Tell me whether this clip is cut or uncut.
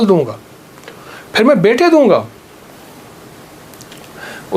uncut